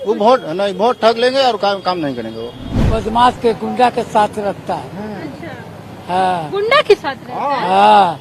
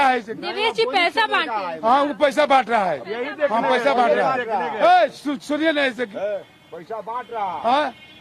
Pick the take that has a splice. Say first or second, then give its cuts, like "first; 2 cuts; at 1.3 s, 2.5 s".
first; 1 cut; at 2.7 s